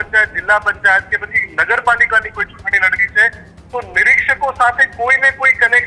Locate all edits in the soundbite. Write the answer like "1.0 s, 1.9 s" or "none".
none

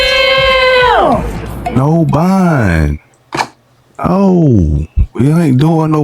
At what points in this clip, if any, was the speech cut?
1.2 s

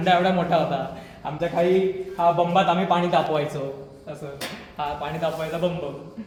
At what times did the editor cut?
none

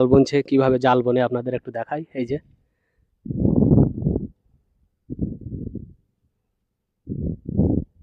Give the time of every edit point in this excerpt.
none

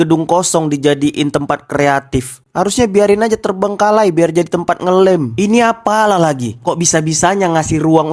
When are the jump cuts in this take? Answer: none

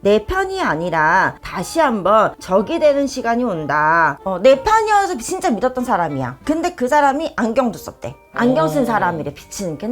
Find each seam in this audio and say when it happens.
4.2 s, 8.2 s

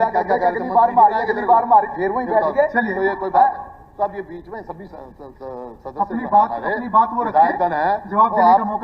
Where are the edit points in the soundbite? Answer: none

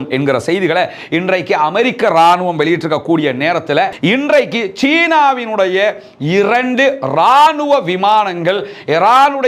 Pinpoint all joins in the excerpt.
3.9 s

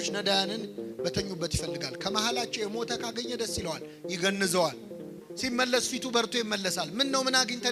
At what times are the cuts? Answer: none

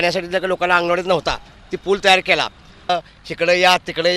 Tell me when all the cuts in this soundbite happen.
2.9 s

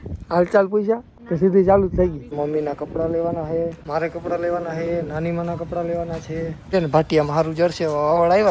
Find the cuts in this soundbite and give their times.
1.2 s, 2.3 s, 3.8 s, 6.7 s

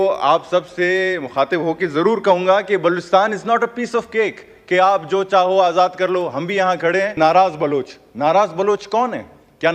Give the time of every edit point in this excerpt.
7.2 s

